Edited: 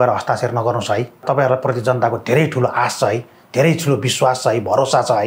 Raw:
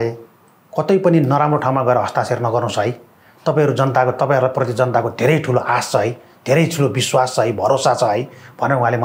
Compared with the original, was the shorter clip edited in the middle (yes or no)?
yes